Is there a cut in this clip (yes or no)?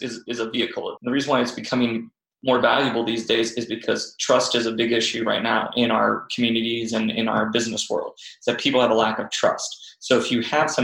yes